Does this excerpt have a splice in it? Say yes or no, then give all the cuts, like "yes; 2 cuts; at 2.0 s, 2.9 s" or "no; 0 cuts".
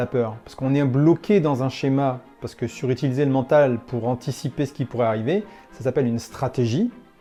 no; 0 cuts